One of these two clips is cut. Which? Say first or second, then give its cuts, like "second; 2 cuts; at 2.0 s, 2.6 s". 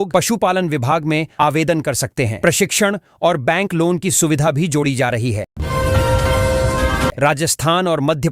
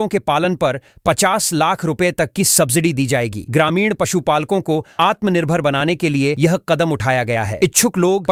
first; 2 cuts; at 5.4 s, 7.1 s